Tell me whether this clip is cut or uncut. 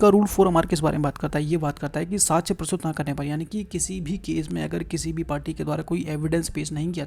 uncut